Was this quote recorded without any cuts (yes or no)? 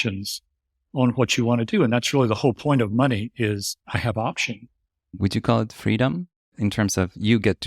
no